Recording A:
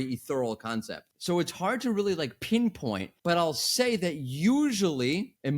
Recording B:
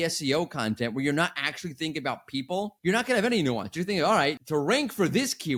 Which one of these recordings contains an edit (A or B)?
A